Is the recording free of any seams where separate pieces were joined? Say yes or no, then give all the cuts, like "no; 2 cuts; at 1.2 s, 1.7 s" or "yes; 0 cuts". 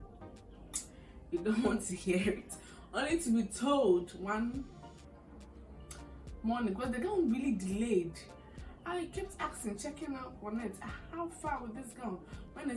yes; 0 cuts